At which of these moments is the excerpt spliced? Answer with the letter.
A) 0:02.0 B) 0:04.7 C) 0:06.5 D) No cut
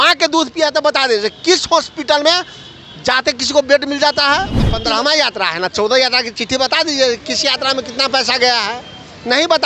B